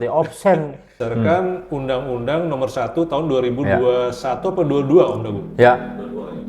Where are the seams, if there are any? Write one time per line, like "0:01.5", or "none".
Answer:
0:01.0